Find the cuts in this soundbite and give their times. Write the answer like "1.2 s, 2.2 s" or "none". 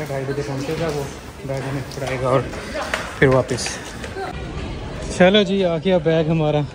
4.3 s